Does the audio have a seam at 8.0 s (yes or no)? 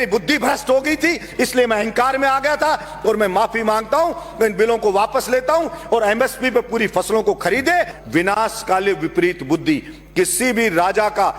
yes